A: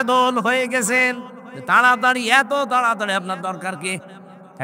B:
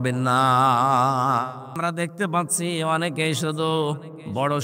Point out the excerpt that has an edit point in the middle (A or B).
B